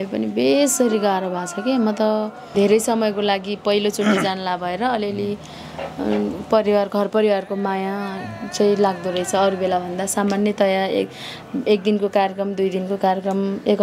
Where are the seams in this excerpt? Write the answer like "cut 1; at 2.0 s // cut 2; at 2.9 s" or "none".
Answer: cut 1; at 2.5 s